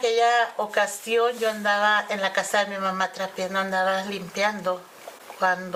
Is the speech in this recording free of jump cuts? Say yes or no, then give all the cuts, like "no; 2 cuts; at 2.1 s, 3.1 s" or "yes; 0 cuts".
yes; 0 cuts